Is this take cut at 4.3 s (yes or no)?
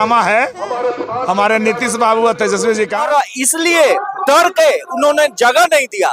no